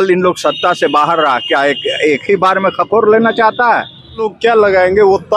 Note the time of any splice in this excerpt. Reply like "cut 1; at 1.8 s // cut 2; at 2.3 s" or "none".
cut 1; at 4.3 s